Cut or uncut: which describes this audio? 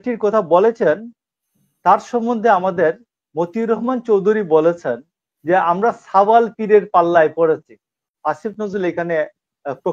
cut